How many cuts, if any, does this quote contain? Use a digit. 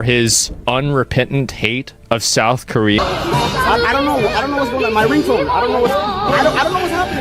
1